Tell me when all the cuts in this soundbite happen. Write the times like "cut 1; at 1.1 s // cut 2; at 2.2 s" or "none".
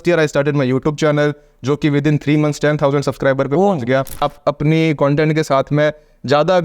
cut 1; at 4.2 s